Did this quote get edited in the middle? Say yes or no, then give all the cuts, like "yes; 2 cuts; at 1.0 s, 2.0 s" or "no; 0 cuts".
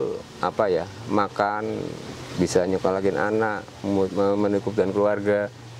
no; 0 cuts